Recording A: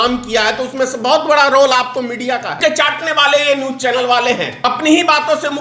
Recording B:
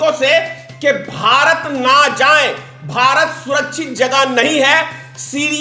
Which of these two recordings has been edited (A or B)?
A